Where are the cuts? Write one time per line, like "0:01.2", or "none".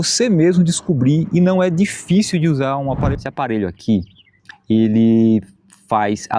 0:03.0